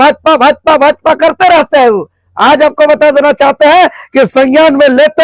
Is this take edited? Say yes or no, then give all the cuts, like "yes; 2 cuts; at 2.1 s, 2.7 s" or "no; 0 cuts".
no; 0 cuts